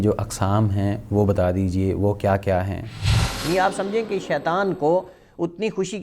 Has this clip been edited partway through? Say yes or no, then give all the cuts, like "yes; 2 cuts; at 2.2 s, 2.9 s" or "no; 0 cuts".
yes; 1 cut; at 3.1 s